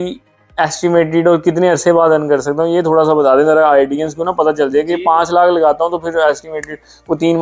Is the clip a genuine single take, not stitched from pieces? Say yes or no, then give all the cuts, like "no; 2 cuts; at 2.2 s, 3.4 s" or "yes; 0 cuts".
yes; 0 cuts